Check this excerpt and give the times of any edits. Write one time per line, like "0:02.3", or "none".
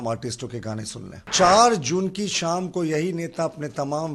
0:01.3